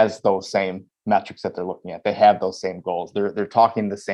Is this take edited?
no; 0 cuts

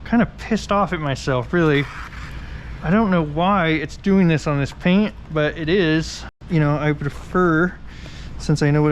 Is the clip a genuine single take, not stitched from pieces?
no; 1 cut; at 6.4 s

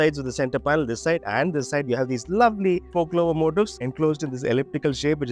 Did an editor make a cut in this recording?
no; 0 cuts

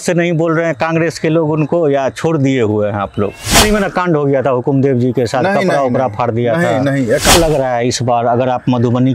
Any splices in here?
yes; 2 cuts; at 3.6 s, 7.3 s

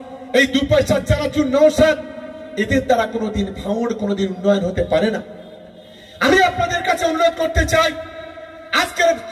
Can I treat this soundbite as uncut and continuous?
yes; 0 cuts

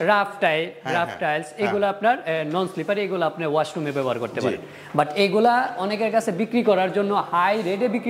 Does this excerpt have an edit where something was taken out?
no; 0 cuts

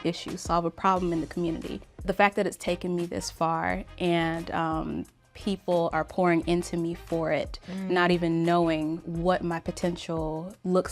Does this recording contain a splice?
yes; 1 cut; at 2.0 s

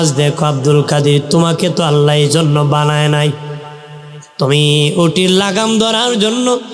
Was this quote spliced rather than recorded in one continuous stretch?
no; 0 cuts

